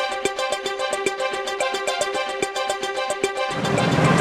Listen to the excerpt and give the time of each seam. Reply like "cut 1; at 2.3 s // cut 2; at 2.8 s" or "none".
none